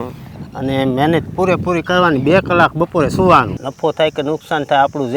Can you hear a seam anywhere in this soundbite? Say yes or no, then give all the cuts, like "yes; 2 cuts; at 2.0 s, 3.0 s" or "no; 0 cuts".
yes; 1 cut; at 3.6 s